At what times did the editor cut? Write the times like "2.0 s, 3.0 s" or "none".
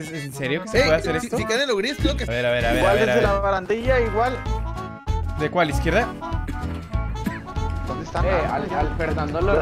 2.3 s